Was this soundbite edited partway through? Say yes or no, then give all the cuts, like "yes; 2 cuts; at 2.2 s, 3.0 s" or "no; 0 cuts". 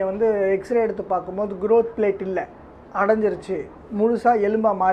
no; 0 cuts